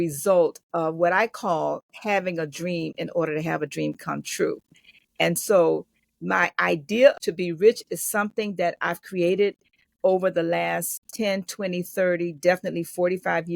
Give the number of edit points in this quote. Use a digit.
1